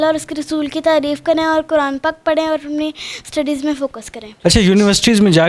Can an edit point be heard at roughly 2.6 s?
no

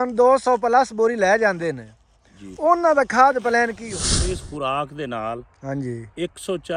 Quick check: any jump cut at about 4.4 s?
yes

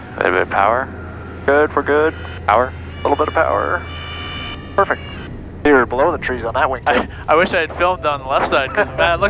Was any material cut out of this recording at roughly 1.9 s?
no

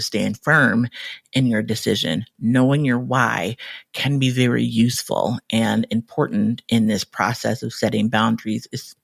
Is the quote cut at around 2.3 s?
no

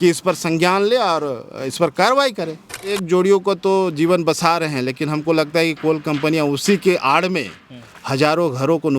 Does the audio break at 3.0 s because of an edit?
yes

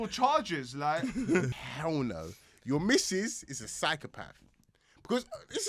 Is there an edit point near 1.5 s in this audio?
yes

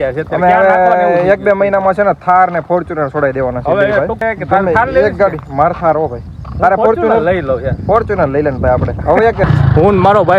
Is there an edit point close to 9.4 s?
yes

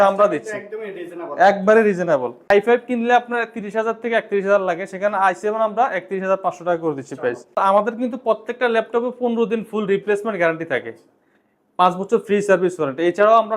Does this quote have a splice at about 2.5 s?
yes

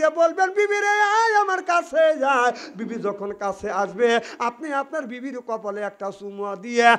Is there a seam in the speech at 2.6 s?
no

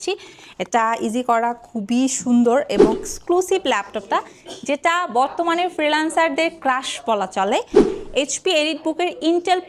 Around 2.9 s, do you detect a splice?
yes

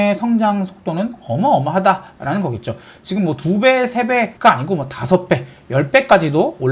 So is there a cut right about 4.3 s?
yes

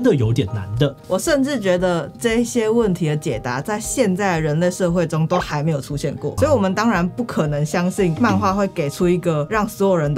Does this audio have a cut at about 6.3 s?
yes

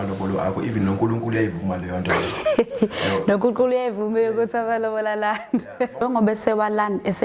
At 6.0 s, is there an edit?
yes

